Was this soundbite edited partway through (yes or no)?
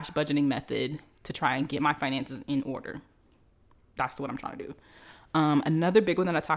no